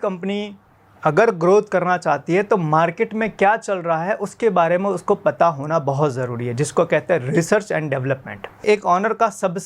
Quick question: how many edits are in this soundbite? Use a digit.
1